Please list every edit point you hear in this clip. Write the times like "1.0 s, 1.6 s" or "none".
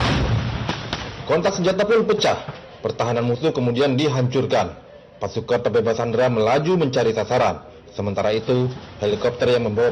6.2 s

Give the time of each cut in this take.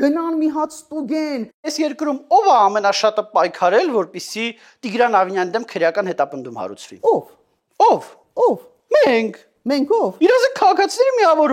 1.7 s

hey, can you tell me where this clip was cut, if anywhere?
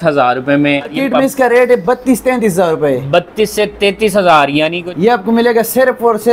0.9 s, 4.8 s

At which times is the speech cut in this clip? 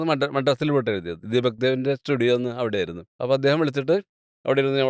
3.0 s

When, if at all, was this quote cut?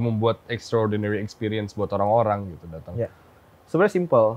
none

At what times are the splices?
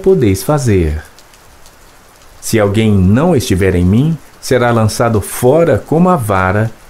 none

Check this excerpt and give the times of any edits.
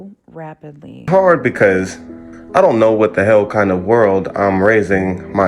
1.0 s

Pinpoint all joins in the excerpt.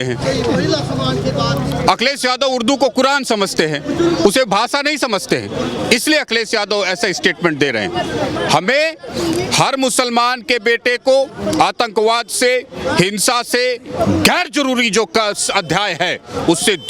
none

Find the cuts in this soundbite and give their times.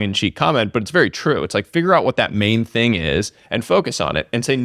none

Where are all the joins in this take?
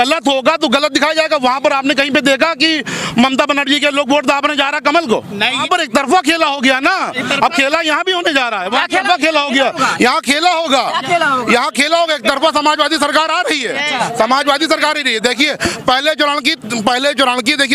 5.6 s

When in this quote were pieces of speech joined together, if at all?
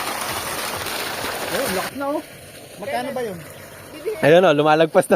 1.5 s

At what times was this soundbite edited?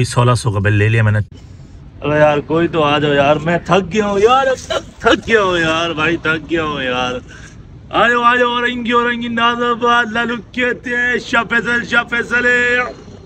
1.3 s

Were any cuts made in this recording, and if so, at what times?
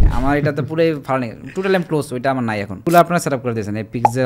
2.8 s

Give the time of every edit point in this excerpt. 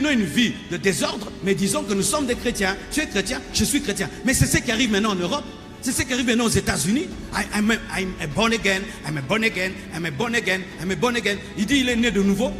none

